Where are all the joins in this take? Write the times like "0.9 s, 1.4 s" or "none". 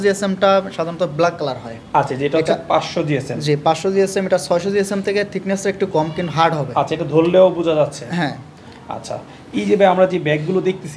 none